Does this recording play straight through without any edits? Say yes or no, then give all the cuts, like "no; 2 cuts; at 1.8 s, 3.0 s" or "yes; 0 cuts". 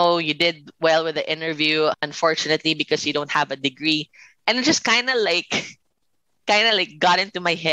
no; 1 cut; at 2.1 s